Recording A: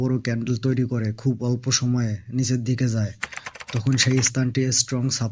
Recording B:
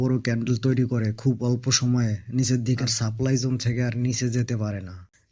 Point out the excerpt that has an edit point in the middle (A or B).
B